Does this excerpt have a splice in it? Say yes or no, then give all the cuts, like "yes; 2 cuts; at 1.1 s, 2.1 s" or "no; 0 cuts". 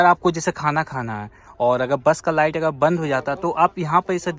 no; 0 cuts